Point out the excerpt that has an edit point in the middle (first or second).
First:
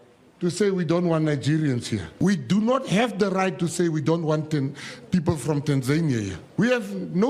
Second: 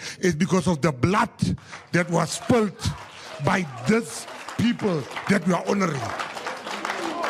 first